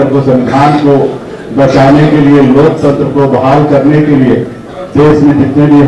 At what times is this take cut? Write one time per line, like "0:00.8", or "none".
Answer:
none